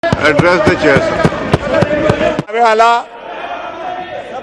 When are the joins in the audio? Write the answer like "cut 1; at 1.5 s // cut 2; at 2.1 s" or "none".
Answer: cut 1; at 2.5 s